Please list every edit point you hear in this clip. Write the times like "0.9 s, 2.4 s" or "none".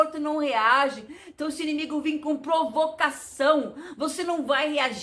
none